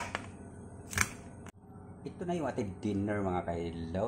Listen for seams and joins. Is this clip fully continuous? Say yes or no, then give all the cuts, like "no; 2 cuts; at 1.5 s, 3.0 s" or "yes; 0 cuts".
no; 1 cut; at 1.5 s